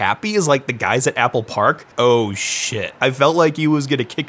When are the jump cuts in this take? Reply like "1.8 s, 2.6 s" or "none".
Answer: 1.9 s

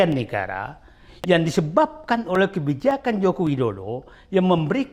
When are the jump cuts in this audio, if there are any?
none

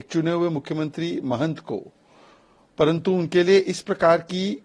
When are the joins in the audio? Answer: none

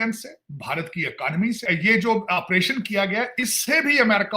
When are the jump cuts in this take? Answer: 1.6 s

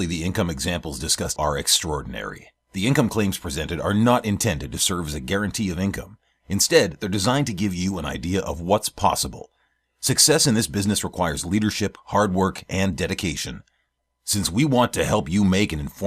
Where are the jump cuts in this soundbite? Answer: 1.3 s

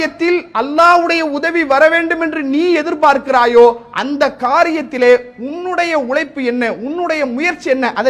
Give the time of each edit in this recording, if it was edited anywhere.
none

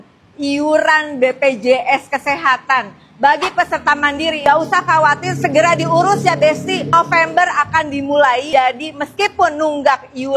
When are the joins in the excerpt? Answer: 4.4 s

